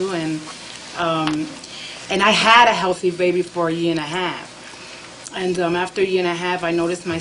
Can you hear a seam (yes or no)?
no